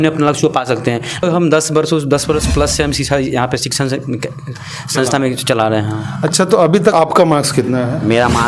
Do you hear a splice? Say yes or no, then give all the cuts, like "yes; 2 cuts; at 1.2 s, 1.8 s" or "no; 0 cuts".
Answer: yes; 2 cuts; at 1.2 s, 6.9 s